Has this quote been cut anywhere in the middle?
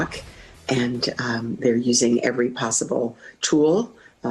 no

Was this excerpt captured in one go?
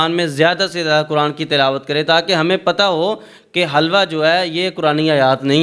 yes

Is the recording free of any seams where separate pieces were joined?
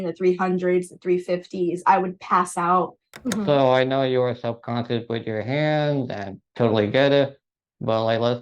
no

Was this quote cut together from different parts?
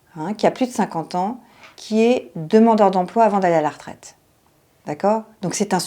no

